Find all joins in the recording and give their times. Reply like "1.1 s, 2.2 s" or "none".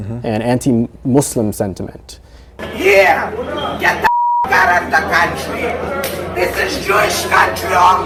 none